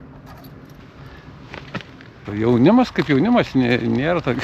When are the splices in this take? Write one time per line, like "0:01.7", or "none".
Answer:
0:02.3